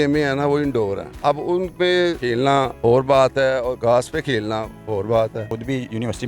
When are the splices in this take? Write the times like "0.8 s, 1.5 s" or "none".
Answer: 1.1 s, 2.3 s, 3.8 s, 5.5 s